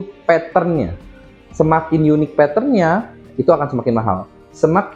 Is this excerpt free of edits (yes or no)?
yes